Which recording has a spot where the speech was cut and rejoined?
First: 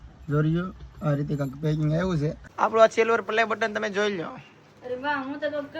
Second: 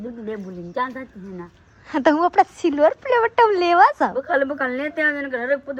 first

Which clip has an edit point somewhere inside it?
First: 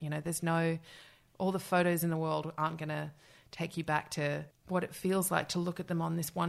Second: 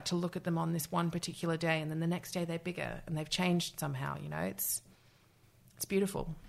first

